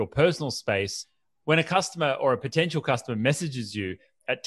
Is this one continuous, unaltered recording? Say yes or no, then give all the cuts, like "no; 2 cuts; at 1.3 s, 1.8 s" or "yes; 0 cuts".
yes; 0 cuts